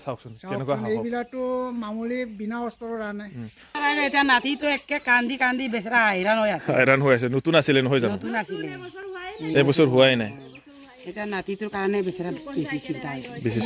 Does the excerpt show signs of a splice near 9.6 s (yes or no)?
no